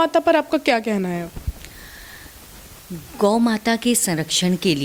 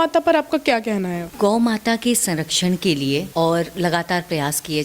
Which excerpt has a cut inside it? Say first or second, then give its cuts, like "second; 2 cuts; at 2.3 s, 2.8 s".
second; 2 cuts; at 1.3 s, 3.3 s